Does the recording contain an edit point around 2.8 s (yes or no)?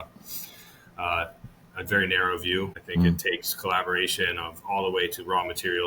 yes